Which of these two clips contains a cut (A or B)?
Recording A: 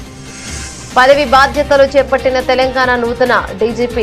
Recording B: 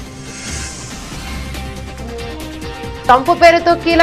B